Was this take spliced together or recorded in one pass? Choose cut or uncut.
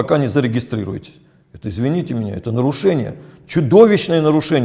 uncut